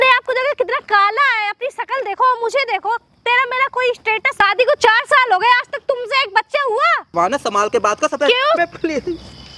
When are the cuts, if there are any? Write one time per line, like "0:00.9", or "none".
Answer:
0:04.3
0:08.6